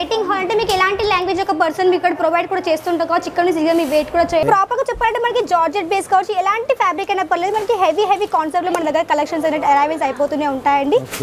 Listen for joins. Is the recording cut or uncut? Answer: cut